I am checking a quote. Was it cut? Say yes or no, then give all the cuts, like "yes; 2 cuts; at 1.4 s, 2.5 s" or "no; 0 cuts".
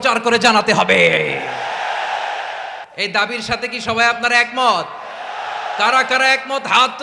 yes; 1 cut; at 2.8 s